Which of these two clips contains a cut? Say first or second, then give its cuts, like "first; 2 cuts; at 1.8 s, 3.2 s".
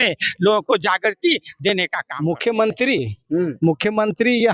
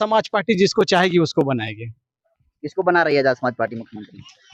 first; 1 cut; at 2.0 s